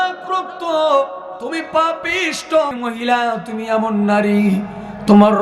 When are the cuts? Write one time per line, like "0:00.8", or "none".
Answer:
0:02.7